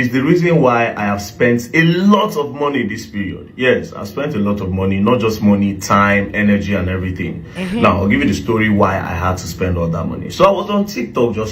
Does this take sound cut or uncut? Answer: uncut